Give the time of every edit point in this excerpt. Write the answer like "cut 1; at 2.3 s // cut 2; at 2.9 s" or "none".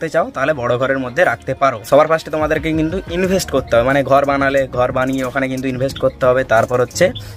none